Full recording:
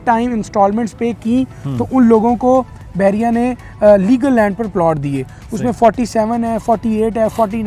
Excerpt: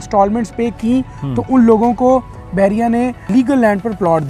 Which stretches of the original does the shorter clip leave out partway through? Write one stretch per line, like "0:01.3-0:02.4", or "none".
0:03.7-0:04.0